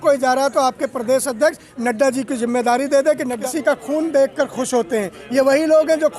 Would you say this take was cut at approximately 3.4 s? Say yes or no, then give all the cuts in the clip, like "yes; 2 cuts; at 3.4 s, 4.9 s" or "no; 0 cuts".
yes; 1 cut; at 3.4 s